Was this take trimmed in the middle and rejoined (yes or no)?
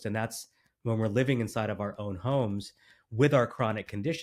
no